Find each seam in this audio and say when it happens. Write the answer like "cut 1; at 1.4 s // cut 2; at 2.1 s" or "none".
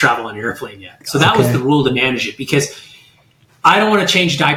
none